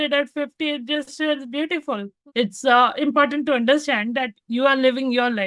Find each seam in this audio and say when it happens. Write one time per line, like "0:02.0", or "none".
0:02.2